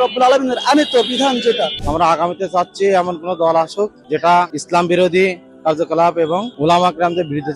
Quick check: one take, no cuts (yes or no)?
no